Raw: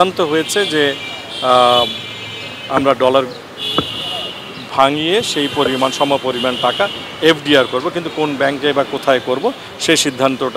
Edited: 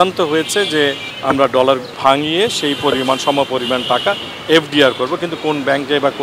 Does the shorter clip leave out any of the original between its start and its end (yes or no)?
yes